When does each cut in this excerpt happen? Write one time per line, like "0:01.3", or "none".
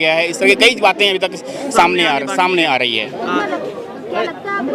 none